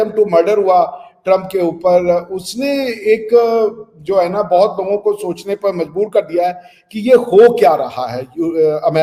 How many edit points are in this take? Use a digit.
0